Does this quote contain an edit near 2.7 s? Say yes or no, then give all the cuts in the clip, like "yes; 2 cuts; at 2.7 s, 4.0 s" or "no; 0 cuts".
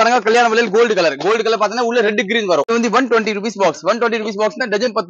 yes; 1 cut; at 2.7 s